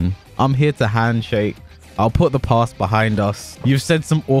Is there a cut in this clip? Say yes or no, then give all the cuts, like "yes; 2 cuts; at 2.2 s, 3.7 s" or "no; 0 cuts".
yes; 1 cut; at 3.5 s